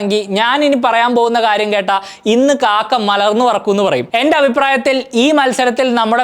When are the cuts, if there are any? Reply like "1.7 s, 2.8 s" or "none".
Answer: 4.0 s